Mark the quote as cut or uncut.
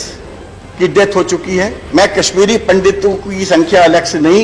cut